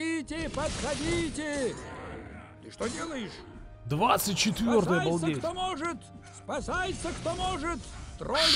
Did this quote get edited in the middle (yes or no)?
no